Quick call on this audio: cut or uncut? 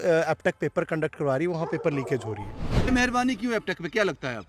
cut